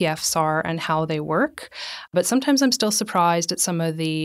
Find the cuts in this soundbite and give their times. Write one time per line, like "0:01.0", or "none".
0:02.1